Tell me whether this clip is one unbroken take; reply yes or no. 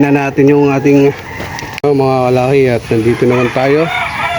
no